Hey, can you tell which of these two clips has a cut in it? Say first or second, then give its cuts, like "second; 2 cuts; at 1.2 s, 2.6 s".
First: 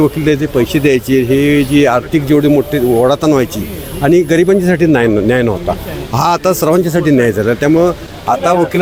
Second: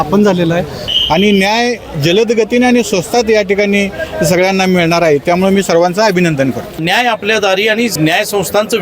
second; 3 cuts; at 0.9 s, 6.8 s, 7.9 s